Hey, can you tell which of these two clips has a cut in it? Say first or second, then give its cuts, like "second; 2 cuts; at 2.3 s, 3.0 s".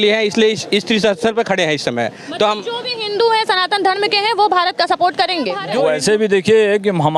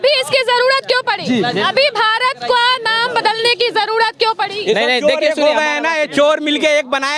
first; 1 cut; at 5.6 s